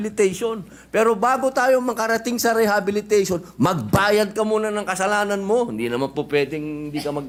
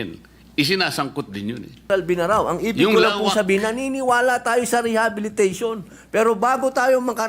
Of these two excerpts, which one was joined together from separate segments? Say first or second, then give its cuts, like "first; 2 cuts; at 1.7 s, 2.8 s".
second; 1 cut; at 1.9 s